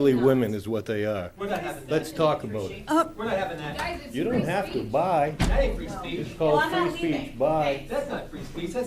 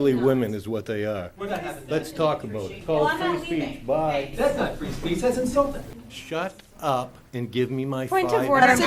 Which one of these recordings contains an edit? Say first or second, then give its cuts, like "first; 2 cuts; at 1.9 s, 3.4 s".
second; 2 cuts; at 2.8 s, 5.9 s